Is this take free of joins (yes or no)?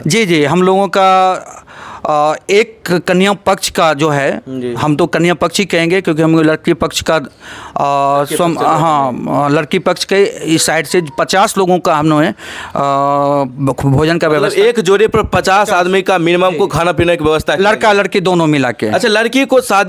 yes